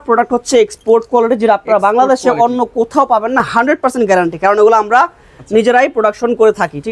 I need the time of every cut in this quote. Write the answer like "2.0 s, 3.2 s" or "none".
none